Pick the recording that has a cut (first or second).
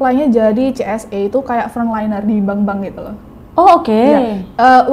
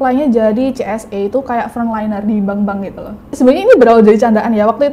second